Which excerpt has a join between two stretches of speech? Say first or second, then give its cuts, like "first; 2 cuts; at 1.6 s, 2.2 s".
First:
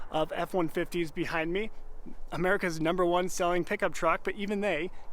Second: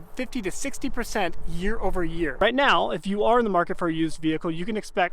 second; 1 cut; at 2.3 s